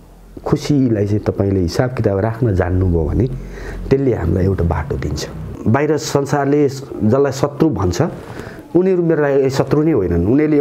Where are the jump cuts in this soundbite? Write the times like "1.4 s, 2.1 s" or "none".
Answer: 5.4 s